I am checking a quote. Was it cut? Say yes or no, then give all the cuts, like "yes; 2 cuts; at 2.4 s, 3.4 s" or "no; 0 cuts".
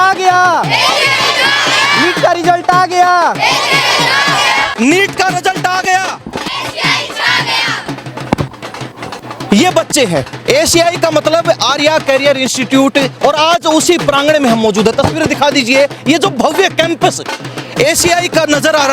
no; 0 cuts